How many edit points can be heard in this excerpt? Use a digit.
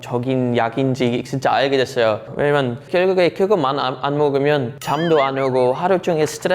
1